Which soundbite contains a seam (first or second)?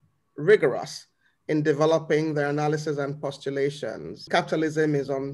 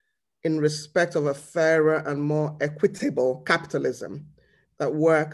first